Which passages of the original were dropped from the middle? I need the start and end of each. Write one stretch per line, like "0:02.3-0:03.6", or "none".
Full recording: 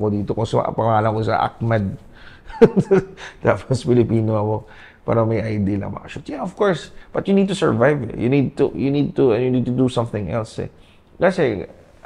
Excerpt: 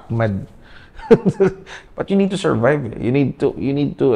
0:03.3-0:06.9